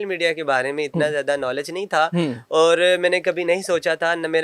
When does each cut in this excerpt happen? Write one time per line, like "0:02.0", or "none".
none